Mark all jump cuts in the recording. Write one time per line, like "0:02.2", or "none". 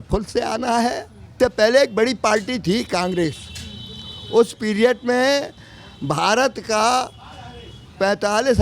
0:01.3